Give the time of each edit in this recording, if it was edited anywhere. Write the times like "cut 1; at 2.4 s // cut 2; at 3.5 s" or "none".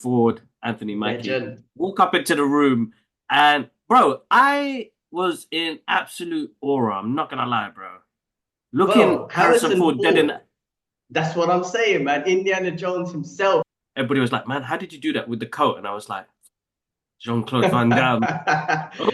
cut 1; at 13.7 s